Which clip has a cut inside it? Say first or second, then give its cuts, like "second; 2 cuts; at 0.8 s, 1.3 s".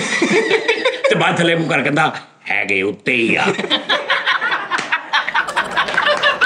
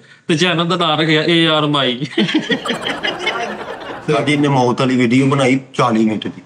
second; 1 cut; at 3.9 s